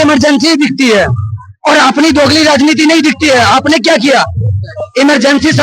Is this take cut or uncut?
uncut